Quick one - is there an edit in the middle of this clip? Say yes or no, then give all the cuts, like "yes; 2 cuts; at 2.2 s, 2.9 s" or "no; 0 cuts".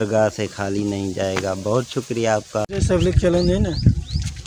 no; 0 cuts